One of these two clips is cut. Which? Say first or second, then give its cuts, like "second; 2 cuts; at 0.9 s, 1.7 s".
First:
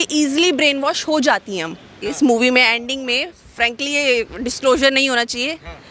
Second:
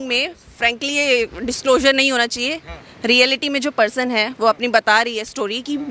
first; 1 cut; at 2.0 s